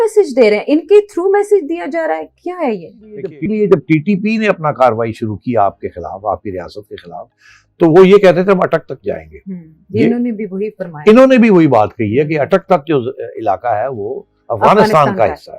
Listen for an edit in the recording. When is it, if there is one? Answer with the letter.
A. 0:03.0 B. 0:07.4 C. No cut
A